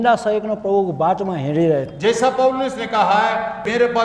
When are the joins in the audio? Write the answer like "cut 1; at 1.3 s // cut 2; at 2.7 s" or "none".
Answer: none